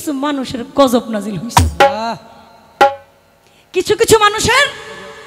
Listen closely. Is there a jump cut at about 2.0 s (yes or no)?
no